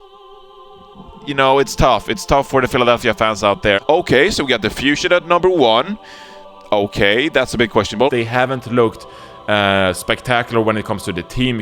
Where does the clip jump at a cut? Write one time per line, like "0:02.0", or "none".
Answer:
none